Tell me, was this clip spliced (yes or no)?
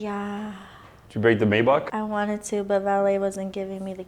yes